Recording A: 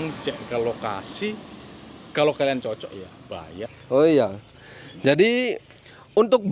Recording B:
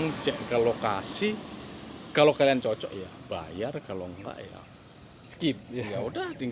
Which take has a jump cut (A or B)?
A